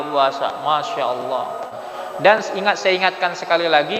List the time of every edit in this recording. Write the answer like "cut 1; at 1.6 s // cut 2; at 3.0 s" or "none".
cut 1; at 1.9 s